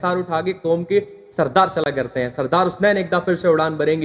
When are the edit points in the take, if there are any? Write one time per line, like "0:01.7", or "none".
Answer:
none